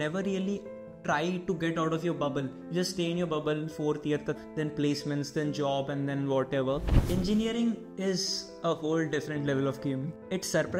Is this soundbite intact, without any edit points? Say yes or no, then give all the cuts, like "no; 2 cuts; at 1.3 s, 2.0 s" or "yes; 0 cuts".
no; 1 cut; at 6.9 s